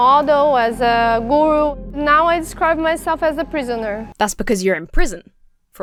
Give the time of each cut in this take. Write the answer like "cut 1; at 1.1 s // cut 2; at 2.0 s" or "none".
none